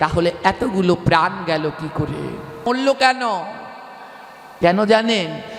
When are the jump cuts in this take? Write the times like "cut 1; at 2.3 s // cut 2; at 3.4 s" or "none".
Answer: cut 1; at 2.6 s